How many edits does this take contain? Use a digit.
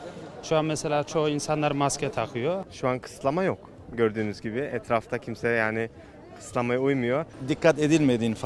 2